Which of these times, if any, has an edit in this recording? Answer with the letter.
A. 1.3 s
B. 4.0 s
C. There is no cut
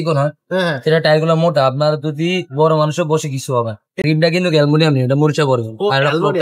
B